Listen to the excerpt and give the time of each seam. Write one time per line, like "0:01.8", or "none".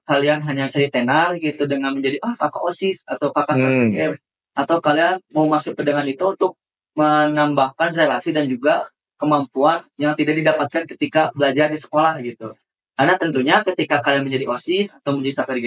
none